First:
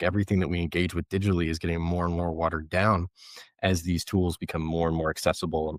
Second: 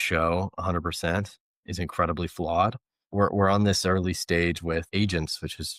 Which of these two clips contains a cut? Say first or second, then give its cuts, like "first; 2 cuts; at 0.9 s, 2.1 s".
second; 3 cuts; at 1.6 s, 3.1 s, 4.9 s